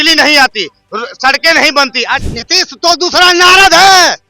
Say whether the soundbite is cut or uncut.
cut